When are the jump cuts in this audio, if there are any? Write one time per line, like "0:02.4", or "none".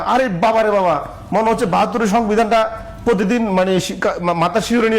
none

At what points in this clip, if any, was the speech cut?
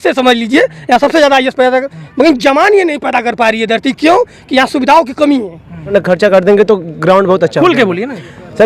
0:05.9

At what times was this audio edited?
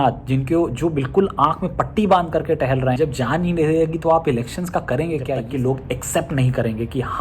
0:03.0
0:05.4

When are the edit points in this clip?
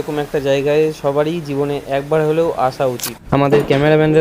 0:03.1

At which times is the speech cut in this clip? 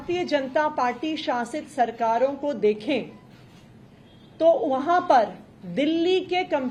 none

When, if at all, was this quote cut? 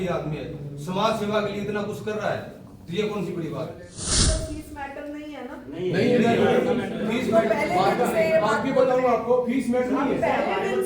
0:04.1

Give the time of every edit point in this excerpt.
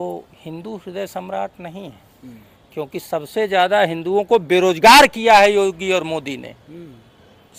none

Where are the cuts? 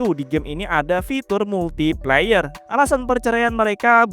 0:02.6

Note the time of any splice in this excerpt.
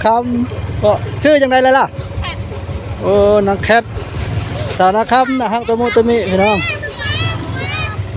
0:02.9

